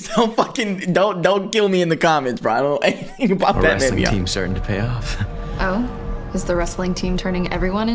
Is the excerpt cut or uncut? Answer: uncut